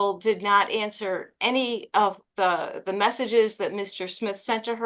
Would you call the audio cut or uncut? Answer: uncut